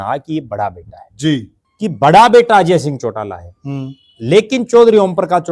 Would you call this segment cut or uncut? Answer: cut